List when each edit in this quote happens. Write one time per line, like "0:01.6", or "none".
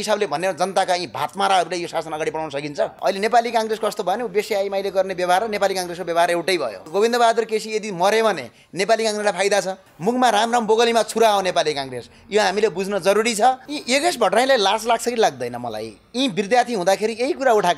0:02.9
0:06.8
0:09.9
0:13.7